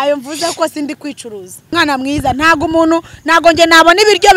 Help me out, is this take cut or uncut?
cut